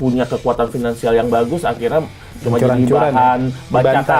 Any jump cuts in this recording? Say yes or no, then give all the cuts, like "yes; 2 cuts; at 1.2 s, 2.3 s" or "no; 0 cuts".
no; 0 cuts